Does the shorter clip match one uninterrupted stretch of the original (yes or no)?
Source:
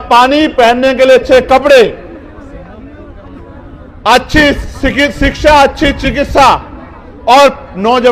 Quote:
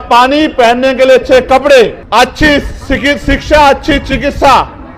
no